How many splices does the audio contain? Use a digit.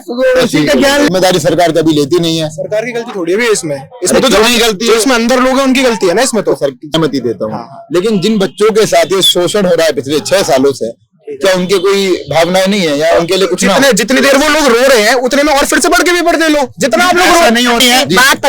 3